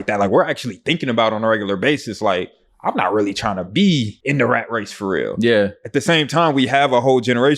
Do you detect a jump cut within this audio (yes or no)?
yes